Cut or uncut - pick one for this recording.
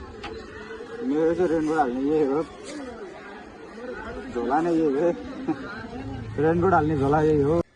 uncut